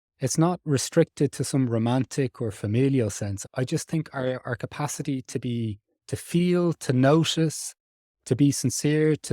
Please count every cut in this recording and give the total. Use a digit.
1